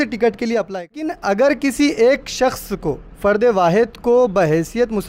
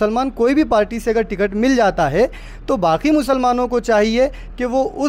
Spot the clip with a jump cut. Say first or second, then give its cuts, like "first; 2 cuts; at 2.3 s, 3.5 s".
first; 1 cut; at 1.2 s